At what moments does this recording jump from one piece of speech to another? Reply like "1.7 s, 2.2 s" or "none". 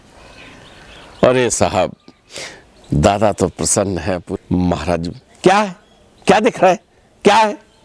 4.3 s